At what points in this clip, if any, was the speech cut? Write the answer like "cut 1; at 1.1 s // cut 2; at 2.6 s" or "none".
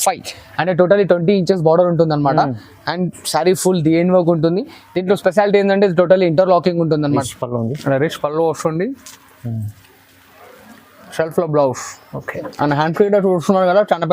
cut 1; at 7.2 s